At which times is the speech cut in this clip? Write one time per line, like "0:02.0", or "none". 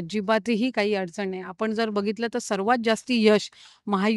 none